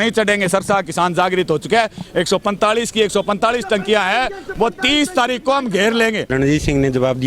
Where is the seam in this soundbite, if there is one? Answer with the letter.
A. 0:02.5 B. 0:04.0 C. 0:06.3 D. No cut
C